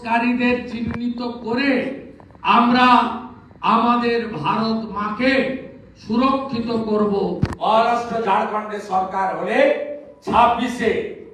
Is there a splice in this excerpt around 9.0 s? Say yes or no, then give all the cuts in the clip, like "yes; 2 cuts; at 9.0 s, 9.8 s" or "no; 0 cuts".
no; 1 cut; at 7.5 s